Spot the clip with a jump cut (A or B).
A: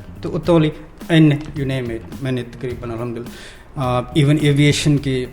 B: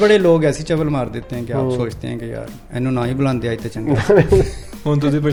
A